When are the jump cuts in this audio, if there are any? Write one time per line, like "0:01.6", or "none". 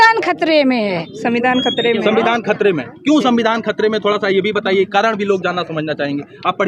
0:01.1